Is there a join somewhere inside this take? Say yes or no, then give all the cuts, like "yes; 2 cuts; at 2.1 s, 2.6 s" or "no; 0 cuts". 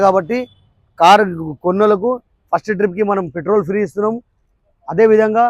no; 0 cuts